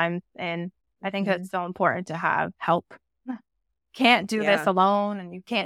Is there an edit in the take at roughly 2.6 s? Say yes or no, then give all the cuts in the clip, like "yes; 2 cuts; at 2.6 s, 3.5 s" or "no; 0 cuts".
yes; 1 cut; at 2.6 s